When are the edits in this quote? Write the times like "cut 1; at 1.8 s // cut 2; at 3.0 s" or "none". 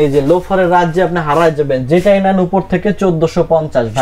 none